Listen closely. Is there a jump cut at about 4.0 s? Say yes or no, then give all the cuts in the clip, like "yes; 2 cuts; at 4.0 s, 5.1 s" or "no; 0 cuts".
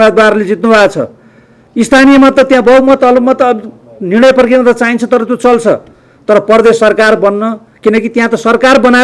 no; 0 cuts